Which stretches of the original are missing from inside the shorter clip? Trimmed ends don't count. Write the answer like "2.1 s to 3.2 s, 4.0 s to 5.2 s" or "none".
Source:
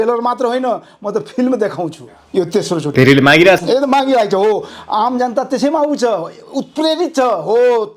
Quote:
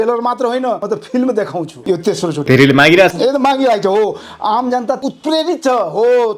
0.8 s to 1.1 s, 2.0 s to 2.2 s, 5.5 s to 6.5 s